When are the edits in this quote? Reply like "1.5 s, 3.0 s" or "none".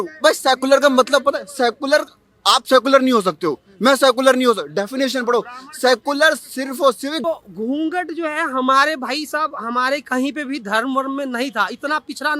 7.2 s